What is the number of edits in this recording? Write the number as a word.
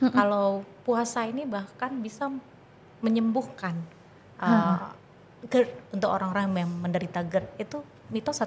zero